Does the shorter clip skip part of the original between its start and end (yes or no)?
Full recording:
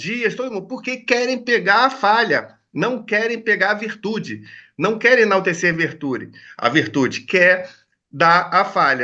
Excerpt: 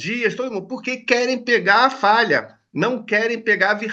no